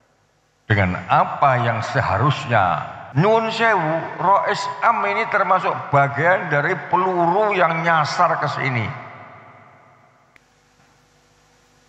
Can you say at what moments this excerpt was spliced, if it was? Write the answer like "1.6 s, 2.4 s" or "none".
3.0 s, 10.2 s